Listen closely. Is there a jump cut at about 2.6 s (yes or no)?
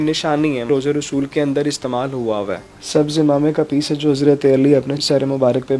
yes